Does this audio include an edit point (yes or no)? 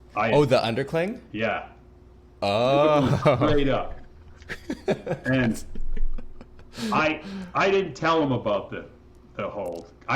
no